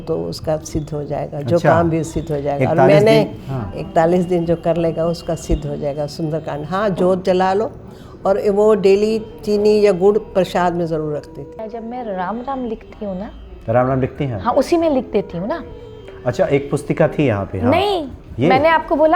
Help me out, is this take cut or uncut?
cut